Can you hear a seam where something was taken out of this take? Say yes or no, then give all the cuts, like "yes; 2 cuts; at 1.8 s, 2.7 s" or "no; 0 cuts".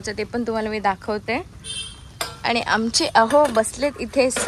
no; 0 cuts